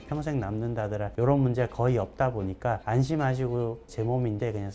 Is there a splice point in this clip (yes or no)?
yes